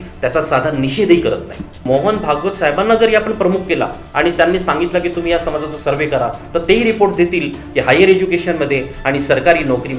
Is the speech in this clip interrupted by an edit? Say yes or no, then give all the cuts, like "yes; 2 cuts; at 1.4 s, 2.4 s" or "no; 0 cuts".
yes; 1 cut; at 1.8 s